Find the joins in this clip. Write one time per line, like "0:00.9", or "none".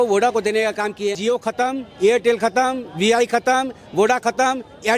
0:01.2